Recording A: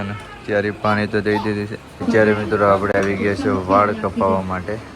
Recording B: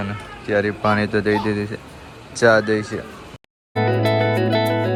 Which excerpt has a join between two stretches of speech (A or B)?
A